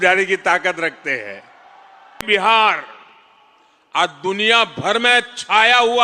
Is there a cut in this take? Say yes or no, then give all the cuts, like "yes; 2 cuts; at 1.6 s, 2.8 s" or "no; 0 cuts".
yes; 1 cut; at 2.2 s